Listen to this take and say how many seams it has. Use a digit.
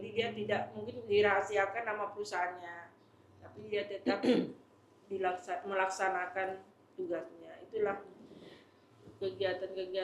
0